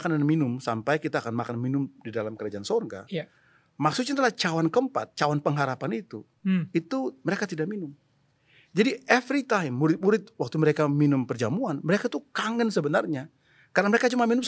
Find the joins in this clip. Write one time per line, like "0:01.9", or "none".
none

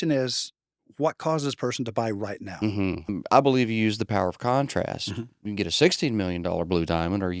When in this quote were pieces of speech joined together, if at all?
0:03.1

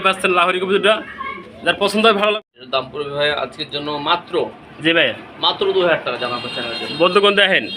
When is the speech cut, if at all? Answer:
0:02.4

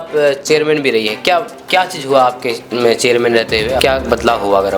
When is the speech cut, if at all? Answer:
0:03.8

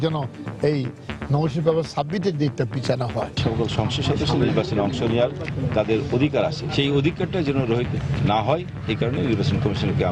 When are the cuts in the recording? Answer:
0:03.4
0:06.6

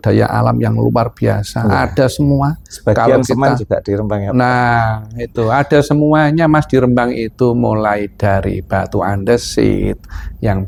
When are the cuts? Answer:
none

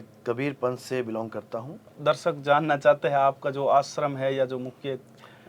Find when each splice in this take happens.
0:01.9

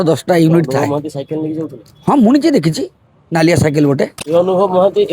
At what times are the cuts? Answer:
0:04.2

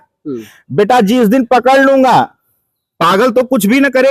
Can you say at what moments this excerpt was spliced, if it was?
none

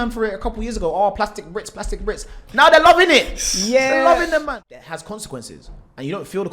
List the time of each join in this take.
0:04.4

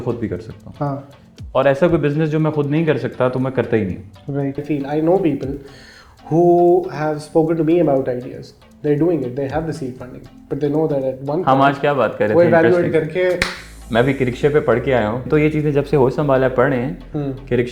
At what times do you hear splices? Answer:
0:04.6
0:15.2

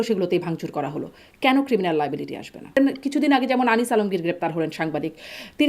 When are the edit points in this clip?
0:02.8

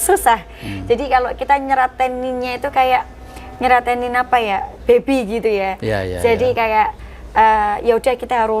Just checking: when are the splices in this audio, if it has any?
none

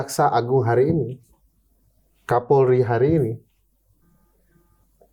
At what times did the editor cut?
none

